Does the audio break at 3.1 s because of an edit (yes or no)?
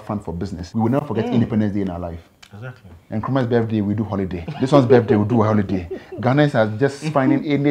yes